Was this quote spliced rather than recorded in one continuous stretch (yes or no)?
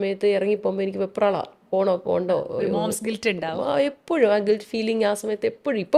no